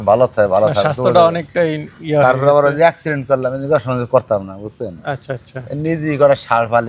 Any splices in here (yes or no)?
no